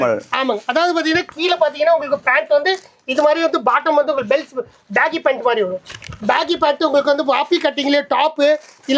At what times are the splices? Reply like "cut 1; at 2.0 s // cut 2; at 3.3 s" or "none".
none